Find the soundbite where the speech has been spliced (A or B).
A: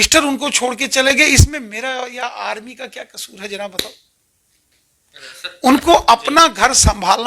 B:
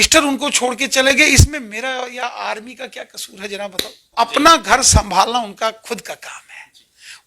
B